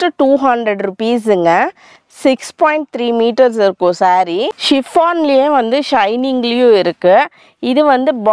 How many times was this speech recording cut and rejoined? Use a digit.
1